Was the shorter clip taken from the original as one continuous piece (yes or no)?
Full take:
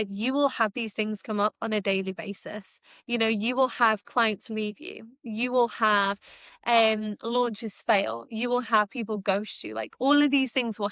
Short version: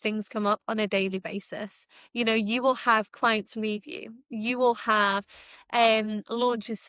yes